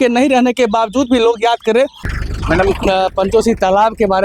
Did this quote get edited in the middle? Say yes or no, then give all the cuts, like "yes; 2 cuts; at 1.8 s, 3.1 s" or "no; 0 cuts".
yes; 1 cut; at 2.0 s